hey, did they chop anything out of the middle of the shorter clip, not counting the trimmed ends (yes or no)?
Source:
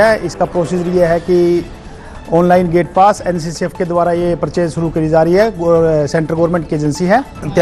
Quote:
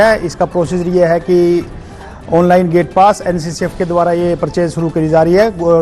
no